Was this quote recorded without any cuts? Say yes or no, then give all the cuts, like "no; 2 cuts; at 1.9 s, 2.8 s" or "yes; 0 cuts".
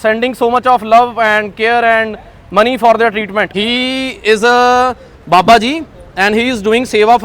no; 1 cut; at 3.5 s